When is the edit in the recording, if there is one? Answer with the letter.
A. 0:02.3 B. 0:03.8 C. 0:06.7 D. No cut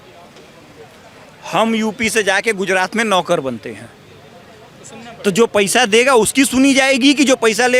D